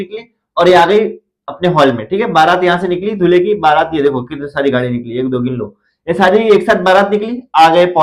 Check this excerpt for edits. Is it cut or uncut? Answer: uncut